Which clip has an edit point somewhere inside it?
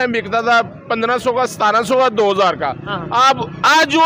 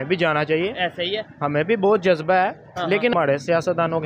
second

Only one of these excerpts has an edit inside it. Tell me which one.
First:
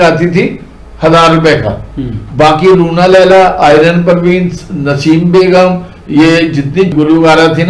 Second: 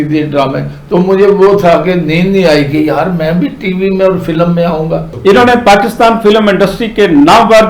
second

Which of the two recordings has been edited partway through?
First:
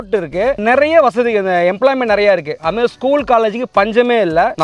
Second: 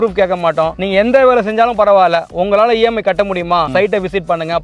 second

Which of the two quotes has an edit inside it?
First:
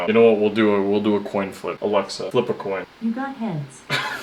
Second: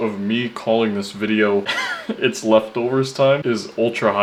first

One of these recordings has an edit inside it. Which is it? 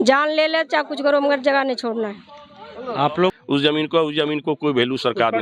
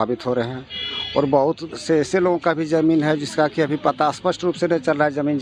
first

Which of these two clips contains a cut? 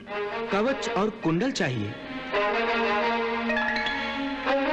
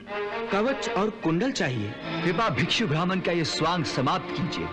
second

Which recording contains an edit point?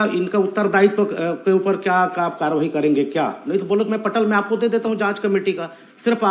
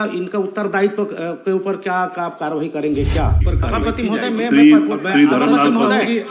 second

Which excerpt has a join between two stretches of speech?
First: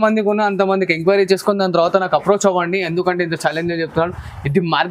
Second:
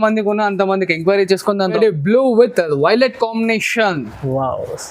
second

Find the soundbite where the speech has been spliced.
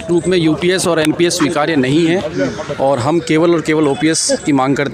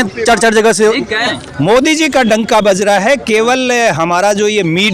second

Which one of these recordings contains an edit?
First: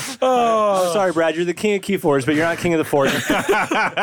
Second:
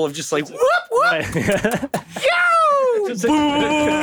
first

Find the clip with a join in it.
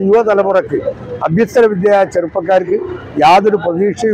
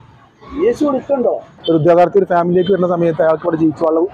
second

